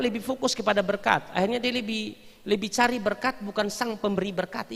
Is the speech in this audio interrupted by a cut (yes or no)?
no